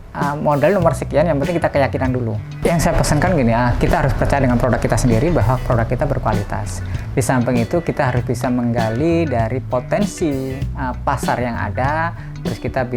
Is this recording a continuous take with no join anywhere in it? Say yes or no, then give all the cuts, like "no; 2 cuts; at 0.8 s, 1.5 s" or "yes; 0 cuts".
no; 1 cut; at 2.4 s